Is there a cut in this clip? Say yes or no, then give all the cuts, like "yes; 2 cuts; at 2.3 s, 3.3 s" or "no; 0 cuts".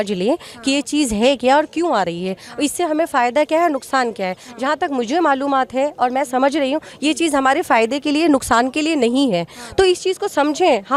no; 0 cuts